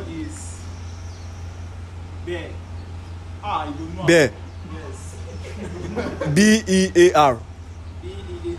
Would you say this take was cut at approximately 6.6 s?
no; 0 cuts

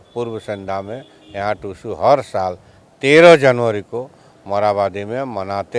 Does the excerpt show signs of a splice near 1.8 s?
no; 0 cuts

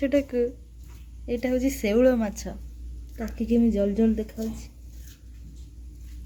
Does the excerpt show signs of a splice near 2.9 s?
no; 0 cuts

